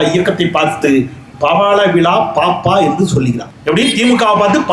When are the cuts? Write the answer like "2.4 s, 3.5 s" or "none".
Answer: 3.5 s